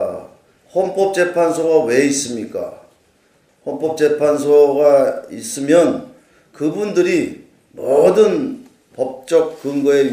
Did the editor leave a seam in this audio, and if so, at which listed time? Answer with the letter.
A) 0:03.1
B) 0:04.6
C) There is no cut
B